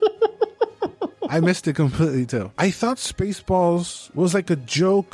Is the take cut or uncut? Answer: cut